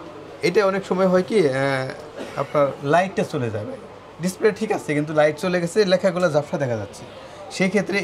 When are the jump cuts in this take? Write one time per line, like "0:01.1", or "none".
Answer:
none